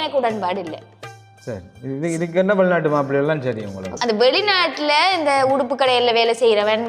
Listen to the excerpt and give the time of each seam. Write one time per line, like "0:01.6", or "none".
0:03.9